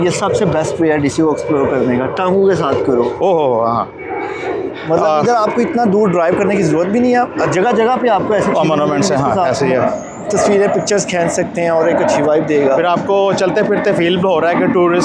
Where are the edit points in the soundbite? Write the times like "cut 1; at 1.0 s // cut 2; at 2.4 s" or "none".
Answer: none